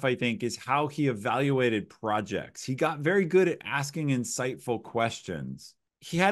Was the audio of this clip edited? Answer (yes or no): no